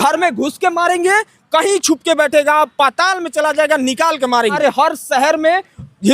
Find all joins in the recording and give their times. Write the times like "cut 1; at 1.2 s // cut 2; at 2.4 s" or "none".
cut 1; at 4.6 s